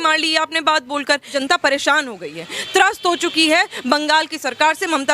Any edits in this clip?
yes; 1 cut; at 1.3 s

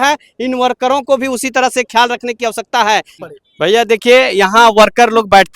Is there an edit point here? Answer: yes; 1 cut; at 3.2 s

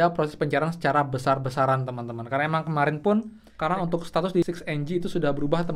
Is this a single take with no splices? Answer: no; 1 cut; at 3.4 s

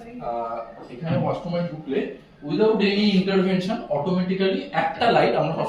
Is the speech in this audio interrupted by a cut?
no; 0 cuts

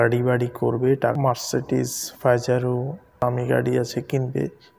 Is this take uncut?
no; 2 cuts; at 1.2 s, 3.2 s

